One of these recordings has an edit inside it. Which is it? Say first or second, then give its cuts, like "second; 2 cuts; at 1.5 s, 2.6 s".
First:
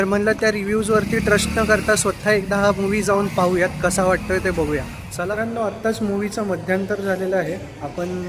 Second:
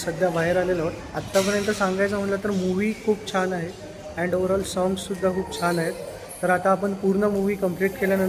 first; 1 cut; at 5.2 s